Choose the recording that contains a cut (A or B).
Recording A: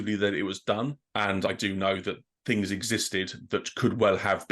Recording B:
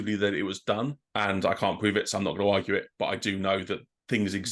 A